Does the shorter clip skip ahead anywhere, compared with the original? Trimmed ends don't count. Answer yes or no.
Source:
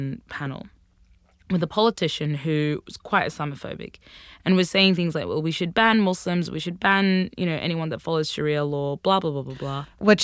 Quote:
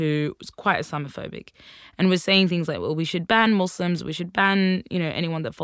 no